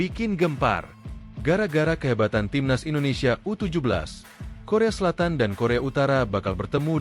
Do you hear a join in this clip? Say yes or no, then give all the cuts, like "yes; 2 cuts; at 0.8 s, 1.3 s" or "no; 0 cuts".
no; 0 cuts